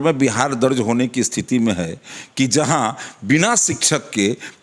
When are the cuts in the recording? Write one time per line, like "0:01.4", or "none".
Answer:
none